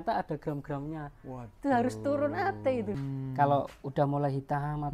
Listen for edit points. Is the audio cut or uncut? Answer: cut